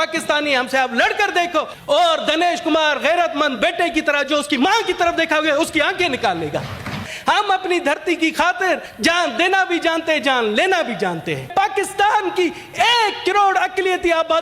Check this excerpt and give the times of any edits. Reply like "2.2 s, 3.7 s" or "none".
1.7 s, 7.1 s, 8.9 s, 11.5 s